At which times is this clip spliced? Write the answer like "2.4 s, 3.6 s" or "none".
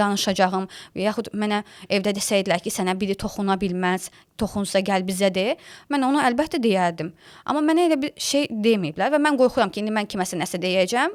none